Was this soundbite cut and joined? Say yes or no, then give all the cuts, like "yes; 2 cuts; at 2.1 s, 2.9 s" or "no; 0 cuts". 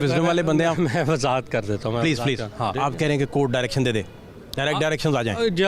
yes; 1 cut; at 2.7 s